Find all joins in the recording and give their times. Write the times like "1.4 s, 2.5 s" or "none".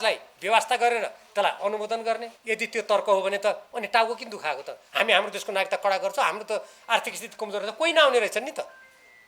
2.3 s